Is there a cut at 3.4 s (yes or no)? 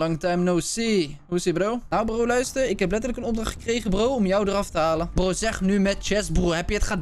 no